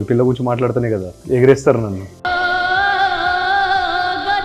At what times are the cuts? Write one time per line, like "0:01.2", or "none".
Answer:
0:02.1

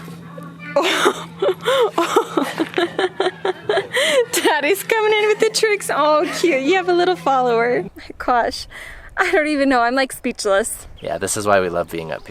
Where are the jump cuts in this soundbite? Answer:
0:07.9
0:10.8

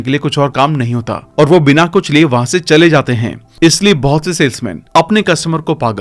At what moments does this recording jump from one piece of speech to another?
none

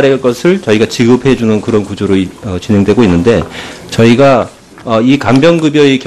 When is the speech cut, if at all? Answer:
0:04.8

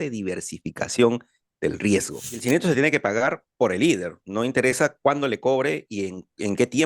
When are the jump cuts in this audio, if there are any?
0:02.4

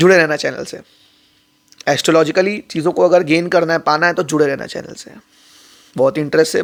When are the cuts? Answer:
none

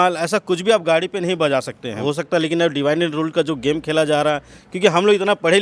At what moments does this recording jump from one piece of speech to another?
0:02.0

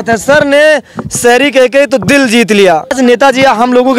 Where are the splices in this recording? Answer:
0:02.9

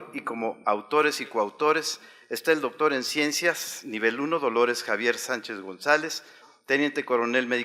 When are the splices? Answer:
0:05.1

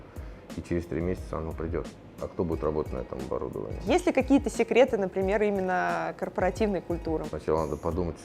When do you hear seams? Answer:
0:03.8
0:07.3

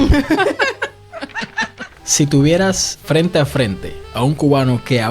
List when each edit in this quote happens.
0:02.0
0:02.9

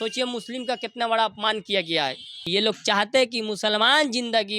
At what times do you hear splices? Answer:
0:02.4

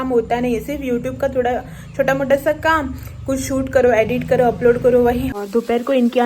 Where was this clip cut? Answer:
0:05.3

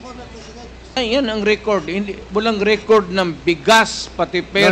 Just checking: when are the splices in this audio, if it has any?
0:01.0

